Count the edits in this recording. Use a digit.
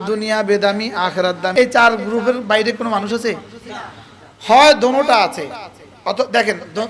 1